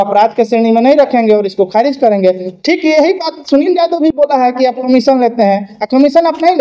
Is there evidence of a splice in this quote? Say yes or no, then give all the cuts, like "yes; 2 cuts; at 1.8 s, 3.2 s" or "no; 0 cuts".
no; 0 cuts